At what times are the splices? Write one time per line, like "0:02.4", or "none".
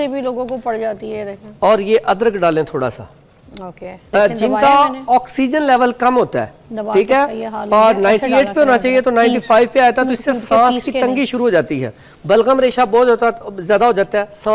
0:04.1